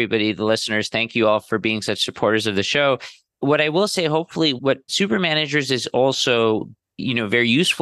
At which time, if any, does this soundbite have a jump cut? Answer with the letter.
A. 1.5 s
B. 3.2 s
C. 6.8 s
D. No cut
A